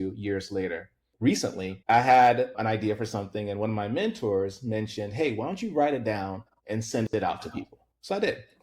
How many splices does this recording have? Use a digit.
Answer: 2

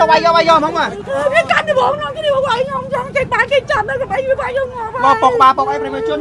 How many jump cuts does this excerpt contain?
1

